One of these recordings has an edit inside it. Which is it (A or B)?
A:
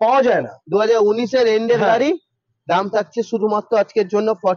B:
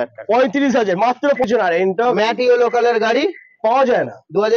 B